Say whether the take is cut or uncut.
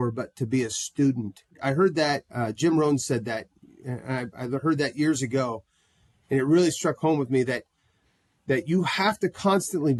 uncut